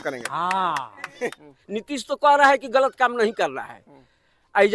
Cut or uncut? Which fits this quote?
cut